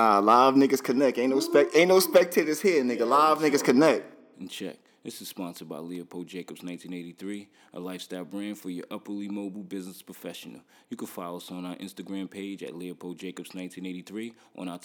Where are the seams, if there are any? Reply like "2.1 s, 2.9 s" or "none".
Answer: 4.2 s